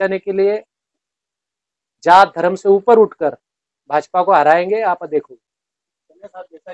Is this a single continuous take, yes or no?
yes